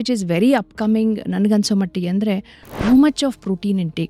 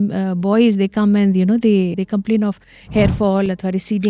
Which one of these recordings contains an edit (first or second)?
second